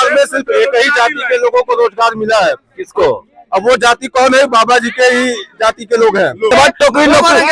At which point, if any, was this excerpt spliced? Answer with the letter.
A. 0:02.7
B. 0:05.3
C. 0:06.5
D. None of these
C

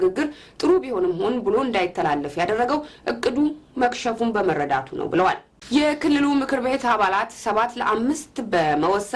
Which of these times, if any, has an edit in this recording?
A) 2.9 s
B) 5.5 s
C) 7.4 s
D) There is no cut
B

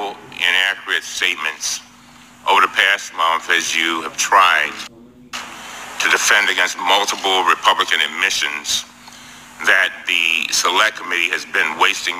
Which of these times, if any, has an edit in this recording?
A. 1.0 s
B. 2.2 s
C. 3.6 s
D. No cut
D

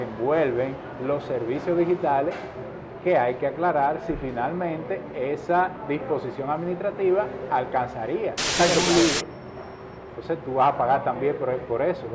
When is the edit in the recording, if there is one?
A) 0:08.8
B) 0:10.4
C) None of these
A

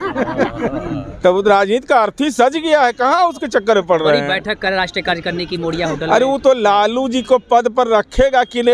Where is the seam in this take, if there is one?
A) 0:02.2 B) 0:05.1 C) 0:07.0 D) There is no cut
D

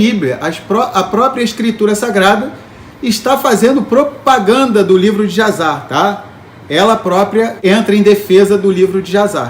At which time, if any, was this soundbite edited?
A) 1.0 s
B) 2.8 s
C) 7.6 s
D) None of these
C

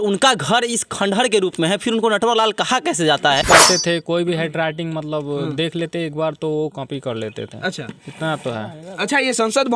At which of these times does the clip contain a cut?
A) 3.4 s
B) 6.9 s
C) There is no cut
A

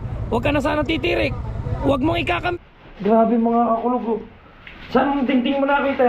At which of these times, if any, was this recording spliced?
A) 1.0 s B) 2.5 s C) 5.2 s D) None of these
B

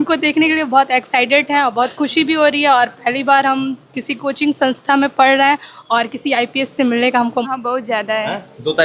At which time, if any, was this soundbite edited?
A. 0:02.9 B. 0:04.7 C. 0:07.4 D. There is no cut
C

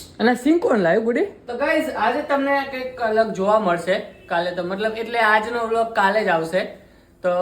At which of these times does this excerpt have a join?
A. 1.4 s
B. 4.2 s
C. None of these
A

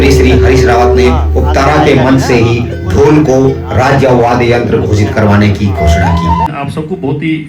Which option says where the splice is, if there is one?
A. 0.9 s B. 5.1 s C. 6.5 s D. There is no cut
C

